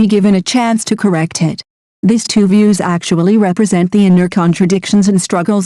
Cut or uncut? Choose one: uncut